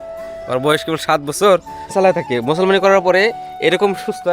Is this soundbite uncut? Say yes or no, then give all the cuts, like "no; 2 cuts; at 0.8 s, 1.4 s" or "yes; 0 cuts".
no; 1 cut; at 1.9 s